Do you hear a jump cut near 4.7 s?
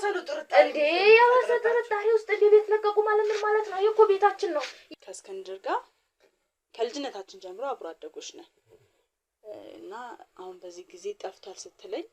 yes; 1 cut; at 4.7 s

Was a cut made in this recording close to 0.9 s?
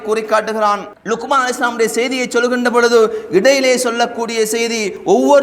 yes; 1 cut; at 0.9 s

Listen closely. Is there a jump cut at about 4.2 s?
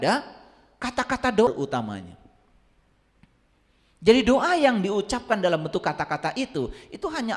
no; 1 cut; at 1.5 s

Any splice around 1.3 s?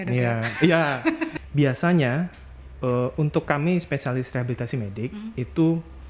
yes; 1 cut; at 1.3 s

